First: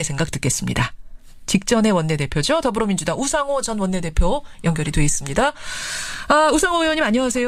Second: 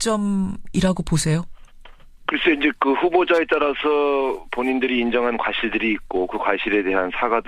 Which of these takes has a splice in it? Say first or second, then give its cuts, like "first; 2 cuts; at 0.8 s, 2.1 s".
second; 1 cut; at 4.6 s